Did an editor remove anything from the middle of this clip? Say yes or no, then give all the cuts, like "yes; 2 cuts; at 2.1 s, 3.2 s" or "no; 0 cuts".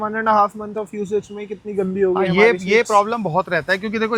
no; 0 cuts